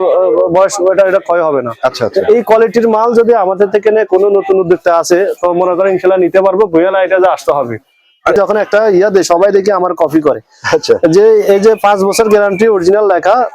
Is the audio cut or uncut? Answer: cut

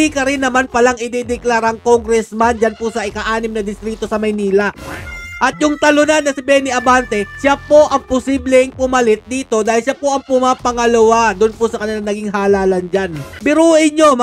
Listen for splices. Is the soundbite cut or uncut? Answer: cut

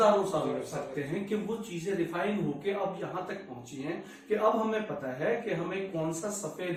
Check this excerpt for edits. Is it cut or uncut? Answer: uncut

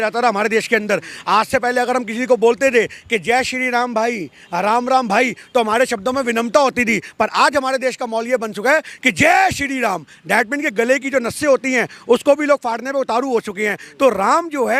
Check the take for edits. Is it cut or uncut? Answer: uncut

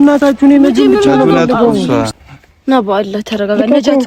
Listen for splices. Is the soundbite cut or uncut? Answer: cut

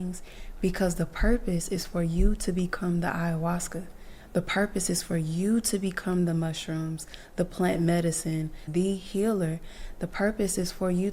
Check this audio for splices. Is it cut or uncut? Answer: cut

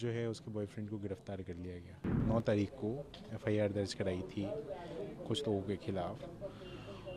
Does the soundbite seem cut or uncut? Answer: cut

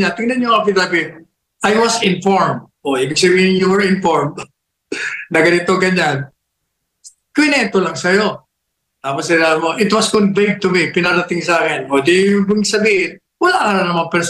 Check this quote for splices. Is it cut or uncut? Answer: uncut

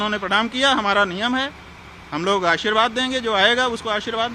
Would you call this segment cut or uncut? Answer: uncut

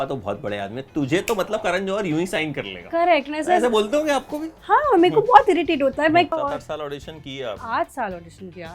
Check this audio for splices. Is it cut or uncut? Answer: cut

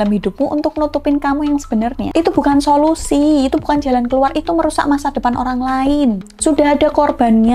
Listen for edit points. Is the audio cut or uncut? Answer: uncut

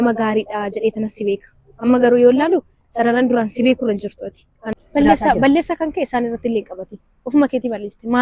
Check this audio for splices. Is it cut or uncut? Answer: cut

